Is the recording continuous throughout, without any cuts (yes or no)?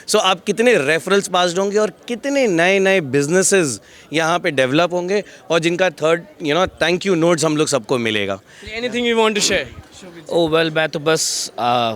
yes